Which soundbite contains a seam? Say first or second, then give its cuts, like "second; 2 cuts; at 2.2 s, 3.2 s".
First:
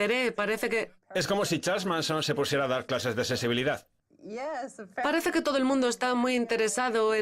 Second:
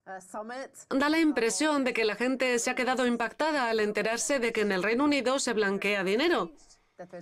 first; 1 cut; at 4.5 s